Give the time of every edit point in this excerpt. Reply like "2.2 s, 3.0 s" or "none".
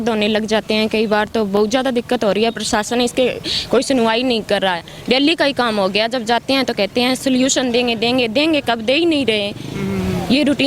none